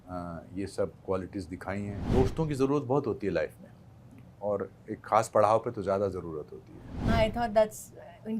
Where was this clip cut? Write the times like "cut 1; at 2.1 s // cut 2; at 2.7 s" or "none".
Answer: cut 1; at 1.9 s // cut 2; at 7.0 s

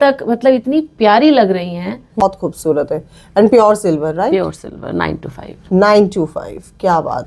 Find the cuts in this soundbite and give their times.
cut 1; at 2.2 s

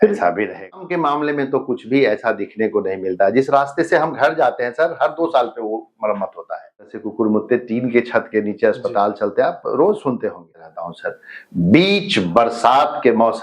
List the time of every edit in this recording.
cut 1; at 0.8 s // cut 2; at 7.0 s // cut 3; at 10.5 s

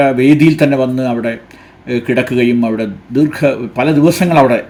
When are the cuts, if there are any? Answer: none

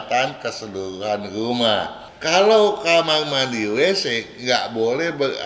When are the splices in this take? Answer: cut 1; at 2.1 s

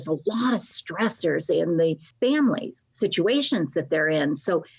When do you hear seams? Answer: cut 1; at 2.1 s // cut 2; at 2.8 s

